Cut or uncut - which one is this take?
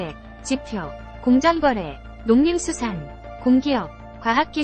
uncut